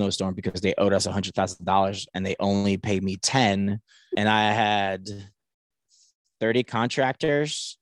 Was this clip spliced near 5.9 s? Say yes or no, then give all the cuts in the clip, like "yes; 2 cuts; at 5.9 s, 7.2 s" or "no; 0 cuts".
no; 1 cut; at 4.0 s